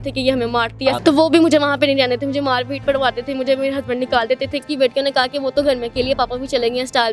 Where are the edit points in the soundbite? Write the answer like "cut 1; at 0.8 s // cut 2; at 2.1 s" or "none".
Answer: cut 1; at 1.0 s // cut 2; at 4.6 s